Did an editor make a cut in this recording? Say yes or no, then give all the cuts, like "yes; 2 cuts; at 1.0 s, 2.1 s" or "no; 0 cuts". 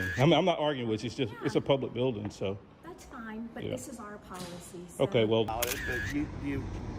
yes; 1 cut; at 5.5 s